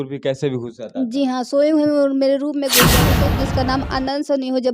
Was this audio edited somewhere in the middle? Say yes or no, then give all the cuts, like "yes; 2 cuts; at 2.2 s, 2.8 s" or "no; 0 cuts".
yes; 1 cut; at 3.1 s